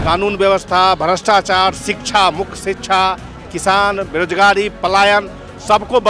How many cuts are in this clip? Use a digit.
0